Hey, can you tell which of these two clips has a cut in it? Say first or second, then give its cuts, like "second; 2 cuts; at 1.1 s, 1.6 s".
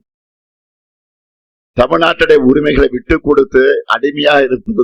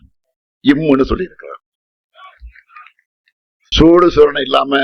second; 1 cut; at 3.7 s